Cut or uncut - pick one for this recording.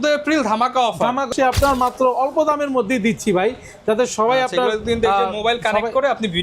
cut